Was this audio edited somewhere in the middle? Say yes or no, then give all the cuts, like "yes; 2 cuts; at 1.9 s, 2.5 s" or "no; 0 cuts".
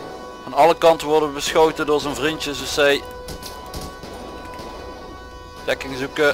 no; 0 cuts